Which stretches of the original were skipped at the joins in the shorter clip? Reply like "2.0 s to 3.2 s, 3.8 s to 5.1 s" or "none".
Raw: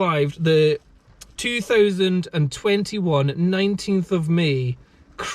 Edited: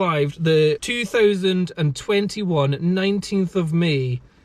0.9 s to 1.5 s

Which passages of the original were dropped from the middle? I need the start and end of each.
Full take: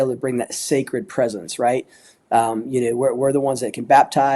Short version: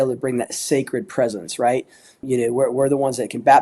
2.2 s to 2.6 s

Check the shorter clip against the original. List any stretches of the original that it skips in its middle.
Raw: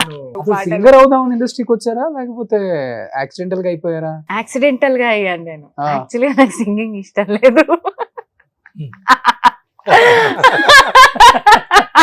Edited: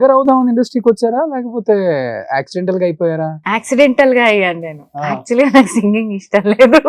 none

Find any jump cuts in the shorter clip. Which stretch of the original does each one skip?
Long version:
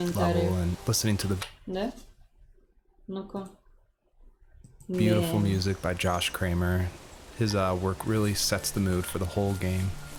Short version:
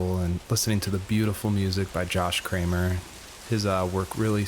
1.5 s to 5.0 s

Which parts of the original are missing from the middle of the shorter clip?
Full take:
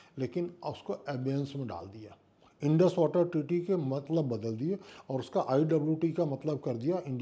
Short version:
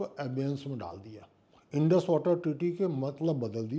none

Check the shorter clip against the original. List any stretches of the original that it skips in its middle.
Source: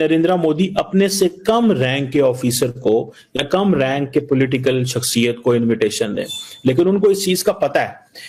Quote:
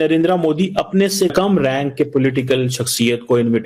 1.3 s to 3.5 s

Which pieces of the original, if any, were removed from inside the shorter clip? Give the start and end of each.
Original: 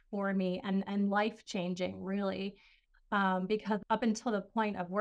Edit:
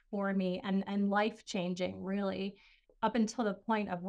3.0 s to 3.8 s

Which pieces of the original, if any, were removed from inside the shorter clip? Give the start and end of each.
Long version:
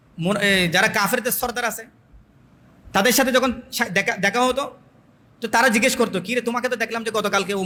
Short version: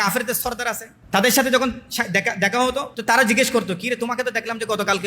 1.9 s to 2.7 s, 4.7 s to 5.4 s

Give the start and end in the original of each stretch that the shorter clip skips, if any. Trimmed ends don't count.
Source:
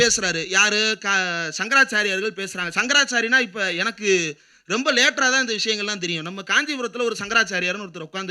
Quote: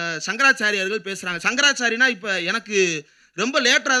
none

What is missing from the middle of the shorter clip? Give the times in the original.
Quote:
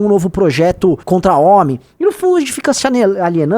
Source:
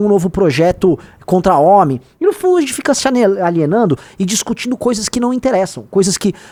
1.0 s to 1.2 s

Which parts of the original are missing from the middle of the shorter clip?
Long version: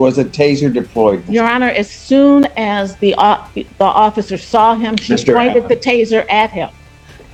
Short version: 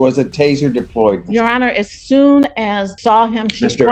2.9 s to 4.4 s

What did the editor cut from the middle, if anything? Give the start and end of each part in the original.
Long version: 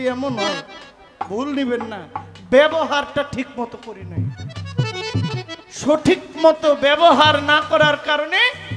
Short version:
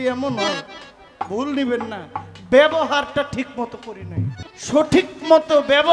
4.5 s to 5.6 s

